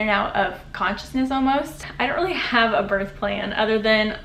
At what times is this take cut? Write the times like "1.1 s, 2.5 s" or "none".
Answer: 1.8 s